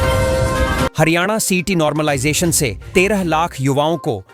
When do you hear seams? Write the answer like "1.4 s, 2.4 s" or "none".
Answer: 0.9 s